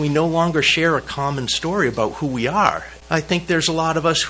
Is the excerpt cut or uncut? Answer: cut